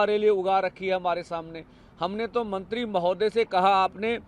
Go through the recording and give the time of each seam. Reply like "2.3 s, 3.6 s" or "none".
none